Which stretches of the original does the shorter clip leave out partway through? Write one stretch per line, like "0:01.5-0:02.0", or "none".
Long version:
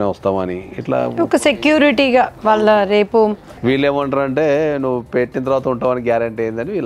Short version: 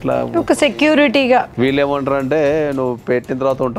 0:02.3-0:03.6